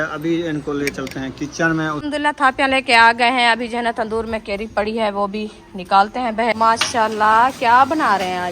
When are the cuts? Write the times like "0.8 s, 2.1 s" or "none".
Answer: 2.0 s, 6.5 s